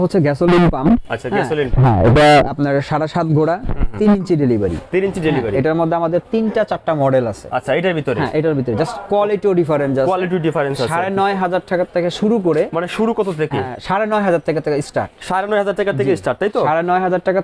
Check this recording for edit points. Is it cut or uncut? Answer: uncut